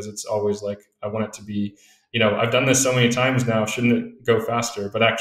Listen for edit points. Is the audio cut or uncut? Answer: uncut